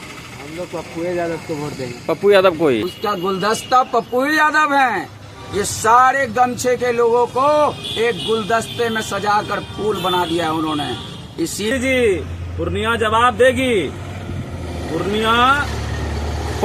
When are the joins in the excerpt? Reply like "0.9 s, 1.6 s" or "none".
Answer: 2.9 s, 11.7 s